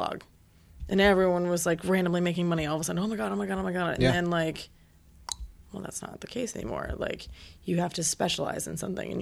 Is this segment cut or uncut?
uncut